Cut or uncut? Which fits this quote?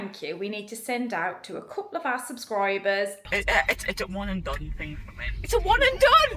cut